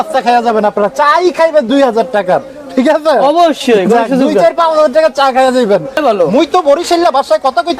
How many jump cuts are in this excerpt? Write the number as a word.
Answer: one